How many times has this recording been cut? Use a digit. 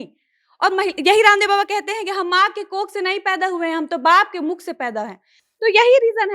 0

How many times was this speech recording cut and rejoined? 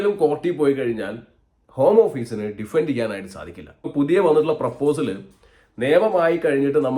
1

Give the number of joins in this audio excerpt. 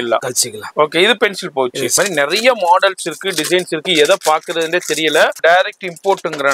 2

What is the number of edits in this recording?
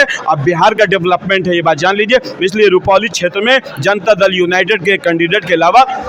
0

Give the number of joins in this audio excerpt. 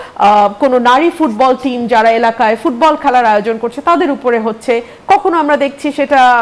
0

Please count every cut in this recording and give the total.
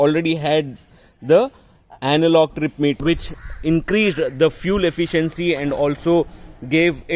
1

